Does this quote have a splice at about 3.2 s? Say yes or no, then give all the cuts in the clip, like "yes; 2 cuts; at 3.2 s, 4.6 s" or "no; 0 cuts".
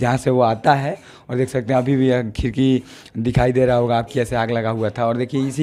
no; 0 cuts